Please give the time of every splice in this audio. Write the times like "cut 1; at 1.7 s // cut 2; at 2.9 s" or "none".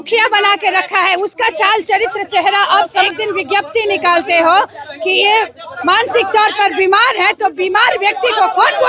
cut 1; at 3.0 s